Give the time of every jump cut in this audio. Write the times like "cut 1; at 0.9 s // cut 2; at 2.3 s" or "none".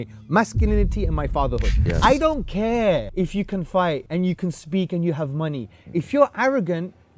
cut 1; at 1.8 s // cut 2; at 3.1 s // cut 3; at 4.0 s